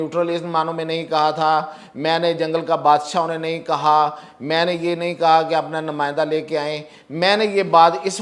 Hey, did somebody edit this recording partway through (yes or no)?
no